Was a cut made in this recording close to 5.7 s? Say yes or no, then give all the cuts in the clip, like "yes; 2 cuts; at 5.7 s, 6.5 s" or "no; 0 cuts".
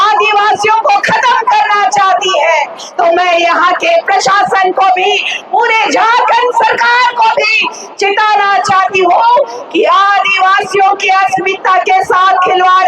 no; 0 cuts